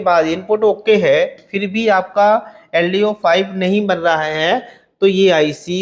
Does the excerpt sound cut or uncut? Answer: uncut